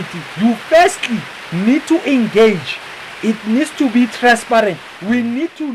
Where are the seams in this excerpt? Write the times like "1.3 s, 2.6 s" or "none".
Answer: none